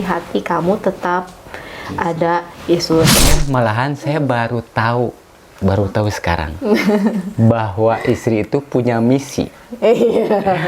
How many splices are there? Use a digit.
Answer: 1